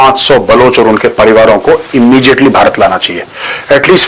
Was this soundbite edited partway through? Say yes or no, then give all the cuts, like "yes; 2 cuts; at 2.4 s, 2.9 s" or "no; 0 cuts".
no; 0 cuts